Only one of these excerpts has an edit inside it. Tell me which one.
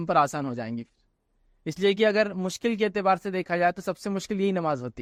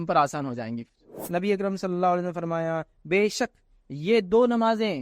second; 1 cut; at 1.2 s

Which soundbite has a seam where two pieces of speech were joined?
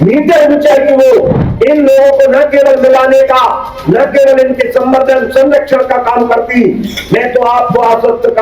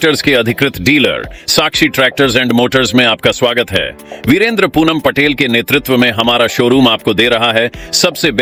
first; 1 cut; at 1.3 s

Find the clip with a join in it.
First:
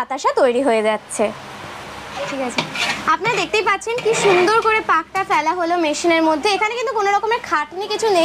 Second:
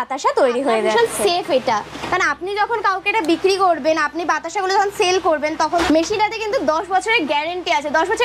second; 2 cuts; at 0.9 s, 5.8 s

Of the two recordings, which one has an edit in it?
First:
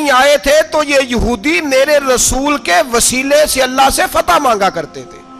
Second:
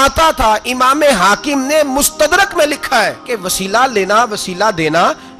second; 1 cut; at 3.2 s

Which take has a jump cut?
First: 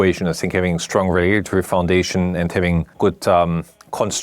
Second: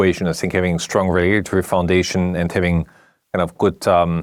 first; 1 cut; at 2.9 s

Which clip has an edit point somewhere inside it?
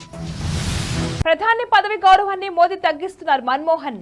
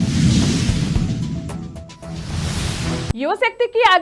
first; 1 cut; at 1.2 s

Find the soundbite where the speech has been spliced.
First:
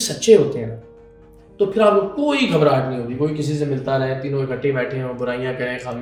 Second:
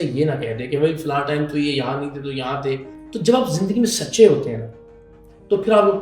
second; 1 cut; at 3.0 s

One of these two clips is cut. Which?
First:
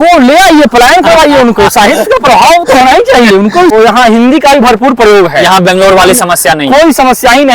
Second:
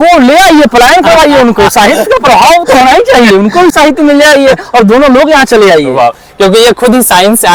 first; 1 cut; at 3.7 s

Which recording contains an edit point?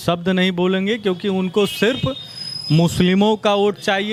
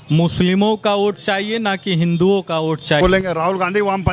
second; 1 cut; at 3.0 s

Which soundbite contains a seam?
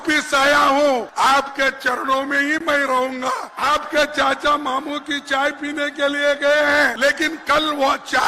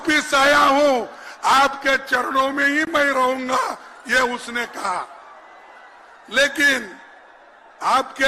first; 3 cuts; at 1.1 s, 3.5 s, 6.9 s

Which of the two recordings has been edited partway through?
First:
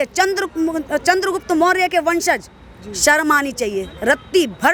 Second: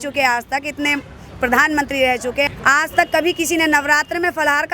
second; 1 cut; at 2.5 s

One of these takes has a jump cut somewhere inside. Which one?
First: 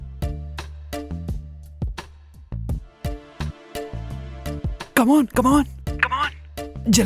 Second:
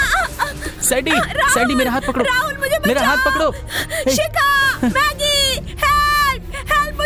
first; 1 cut; at 1.1 s

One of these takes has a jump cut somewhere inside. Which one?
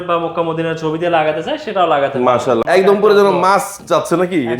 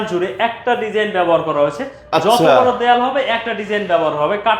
first; 1 cut; at 2.6 s

